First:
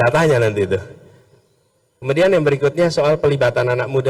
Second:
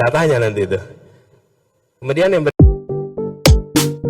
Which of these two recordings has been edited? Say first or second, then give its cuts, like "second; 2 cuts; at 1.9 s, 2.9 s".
second; 1 cut; at 2.5 s